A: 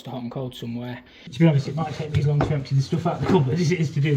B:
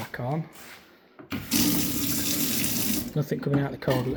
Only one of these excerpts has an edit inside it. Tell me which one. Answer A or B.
A